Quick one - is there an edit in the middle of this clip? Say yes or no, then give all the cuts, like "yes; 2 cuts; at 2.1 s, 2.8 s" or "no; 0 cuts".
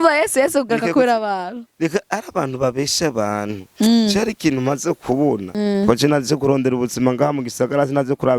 yes; 1 cut; at 5.5 s